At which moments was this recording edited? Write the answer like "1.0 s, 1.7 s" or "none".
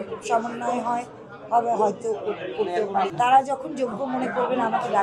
3.1 s